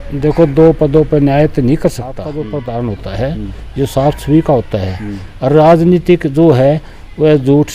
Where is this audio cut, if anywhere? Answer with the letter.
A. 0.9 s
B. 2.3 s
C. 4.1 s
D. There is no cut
B